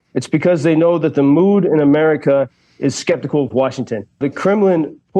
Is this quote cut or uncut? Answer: cut